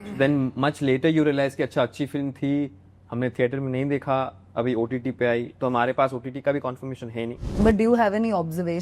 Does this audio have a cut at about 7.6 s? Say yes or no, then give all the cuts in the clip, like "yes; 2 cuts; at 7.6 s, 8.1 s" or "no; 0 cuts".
yes; 1 cut; at 7.6 s